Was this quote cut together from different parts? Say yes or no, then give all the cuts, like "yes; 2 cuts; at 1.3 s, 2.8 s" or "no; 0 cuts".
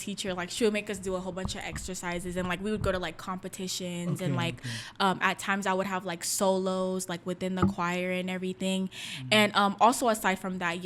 no; 0 cuts